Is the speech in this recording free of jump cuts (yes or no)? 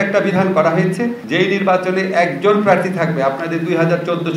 no